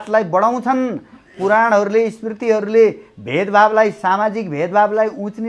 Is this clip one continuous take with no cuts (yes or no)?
yes